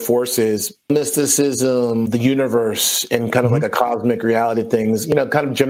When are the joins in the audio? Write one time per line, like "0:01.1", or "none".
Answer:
0:00.9
0:02.1